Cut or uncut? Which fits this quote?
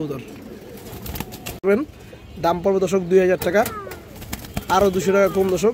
cut